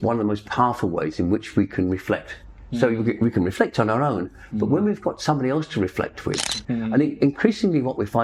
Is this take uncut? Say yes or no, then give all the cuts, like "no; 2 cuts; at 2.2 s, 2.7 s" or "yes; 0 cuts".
no; 1 cut; at 6.5 s